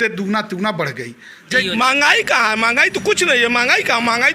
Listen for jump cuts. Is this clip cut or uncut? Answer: cut